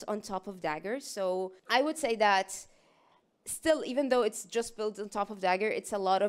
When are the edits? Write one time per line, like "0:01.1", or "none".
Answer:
0:01.6